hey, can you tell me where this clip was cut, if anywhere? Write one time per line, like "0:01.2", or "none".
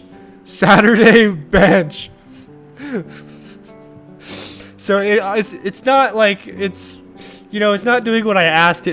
none

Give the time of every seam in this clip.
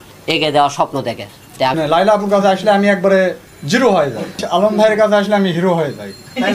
0:01.7
0:04.4

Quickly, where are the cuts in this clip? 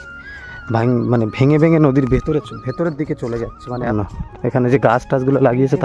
0:03.9

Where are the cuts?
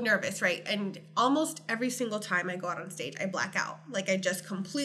none

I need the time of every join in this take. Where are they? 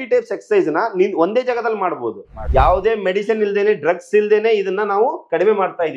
0:02.3

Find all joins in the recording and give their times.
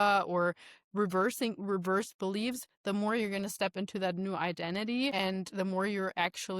0:05.1

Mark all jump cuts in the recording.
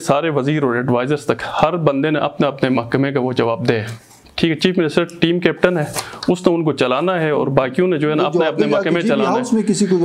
none

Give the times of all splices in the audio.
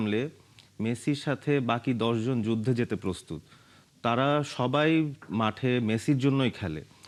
none

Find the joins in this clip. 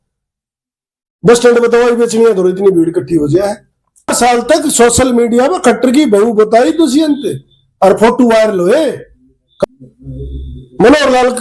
0:04.1
0:09.6

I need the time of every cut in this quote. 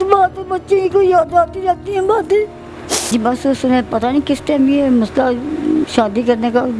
0:03.1

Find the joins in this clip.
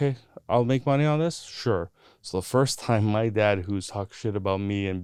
none

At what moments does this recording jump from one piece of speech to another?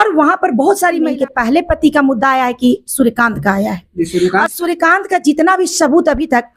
0:01.1

